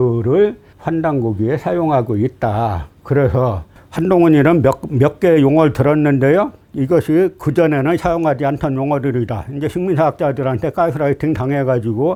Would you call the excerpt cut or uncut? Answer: uncut